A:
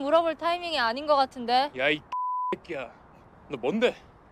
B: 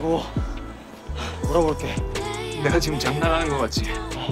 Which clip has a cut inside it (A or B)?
B